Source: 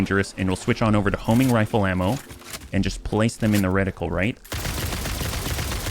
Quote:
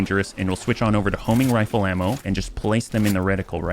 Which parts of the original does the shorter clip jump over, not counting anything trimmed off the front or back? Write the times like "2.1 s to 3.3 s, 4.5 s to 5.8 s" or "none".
2.2 s to 2.7 s